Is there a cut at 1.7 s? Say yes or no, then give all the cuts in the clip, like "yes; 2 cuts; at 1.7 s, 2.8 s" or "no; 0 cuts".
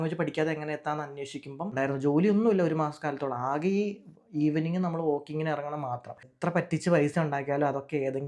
yes; 2 cuts; at 1.7 s, 6.2 s